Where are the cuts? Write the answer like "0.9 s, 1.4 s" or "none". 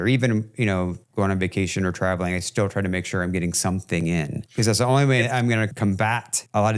1.0 s, 4.4 s, 5.8 s